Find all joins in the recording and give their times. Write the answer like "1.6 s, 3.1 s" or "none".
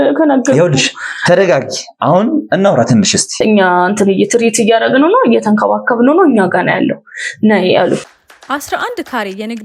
3.3 s, 8.2 s